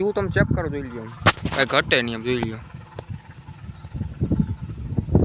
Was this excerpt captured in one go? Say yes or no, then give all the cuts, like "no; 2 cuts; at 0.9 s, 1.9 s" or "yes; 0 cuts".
yes; 0 cuts